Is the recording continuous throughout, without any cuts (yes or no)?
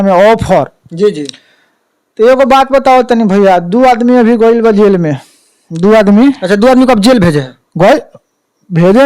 yes